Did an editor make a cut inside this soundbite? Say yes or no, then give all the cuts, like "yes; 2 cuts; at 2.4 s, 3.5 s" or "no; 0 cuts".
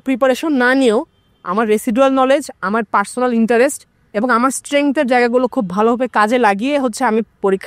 no; 0 cuts